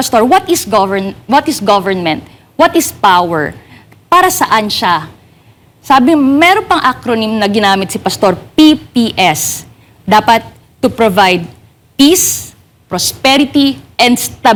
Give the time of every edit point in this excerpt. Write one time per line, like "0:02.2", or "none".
none